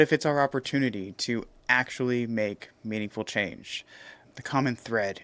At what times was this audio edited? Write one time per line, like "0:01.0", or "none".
0:04.3